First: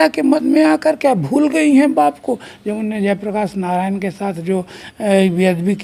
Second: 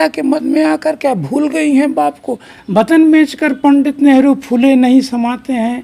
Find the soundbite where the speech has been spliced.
second; 1 cut; at 2.6 s

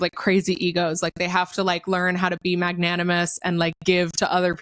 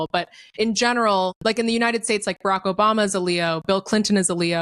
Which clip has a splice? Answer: second; 1 cut; at 1.3 s

